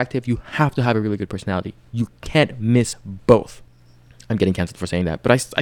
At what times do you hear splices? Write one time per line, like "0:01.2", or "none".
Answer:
0:03.9